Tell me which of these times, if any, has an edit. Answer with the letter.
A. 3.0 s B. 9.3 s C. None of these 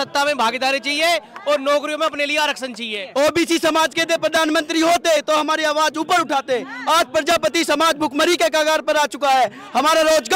A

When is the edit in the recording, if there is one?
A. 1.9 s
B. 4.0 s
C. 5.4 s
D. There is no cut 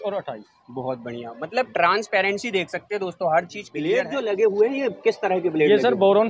B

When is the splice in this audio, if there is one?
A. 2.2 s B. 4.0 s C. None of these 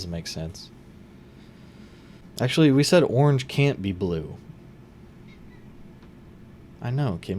A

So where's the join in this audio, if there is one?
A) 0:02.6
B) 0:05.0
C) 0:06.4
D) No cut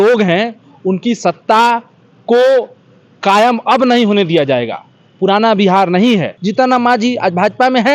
C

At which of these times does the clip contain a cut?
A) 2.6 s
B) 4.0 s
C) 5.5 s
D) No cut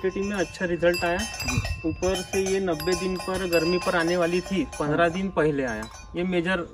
D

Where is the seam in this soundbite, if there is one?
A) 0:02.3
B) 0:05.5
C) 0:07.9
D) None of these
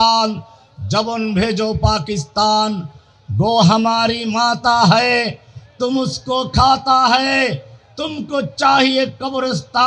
D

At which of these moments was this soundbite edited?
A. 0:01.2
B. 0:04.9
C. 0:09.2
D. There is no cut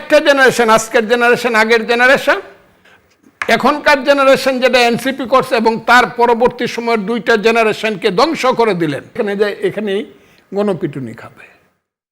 C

